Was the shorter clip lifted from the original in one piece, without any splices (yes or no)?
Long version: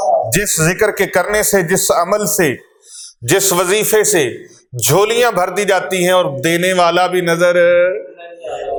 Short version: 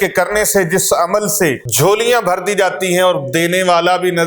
no